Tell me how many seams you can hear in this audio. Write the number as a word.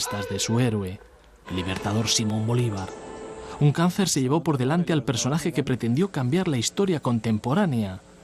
one